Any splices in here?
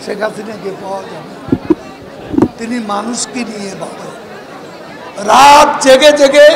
no; 0 cuts

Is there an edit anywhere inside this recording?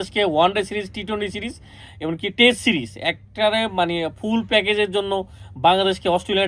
no; 0 cuts

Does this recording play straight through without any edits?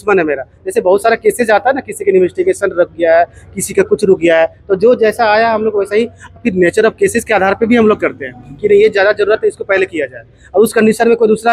yes; 0 cuts

